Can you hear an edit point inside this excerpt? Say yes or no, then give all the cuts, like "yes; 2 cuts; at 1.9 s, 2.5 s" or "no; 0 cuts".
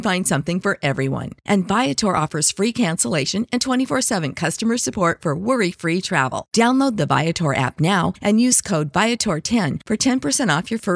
no; 0 cuts